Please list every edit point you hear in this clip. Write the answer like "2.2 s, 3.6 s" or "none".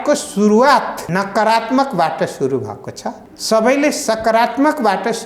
1.0 s, 3.3 s